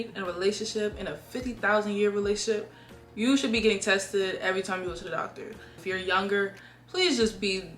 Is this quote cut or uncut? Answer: cut